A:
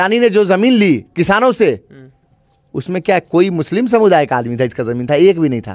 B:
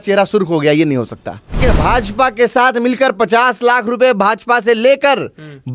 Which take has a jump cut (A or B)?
B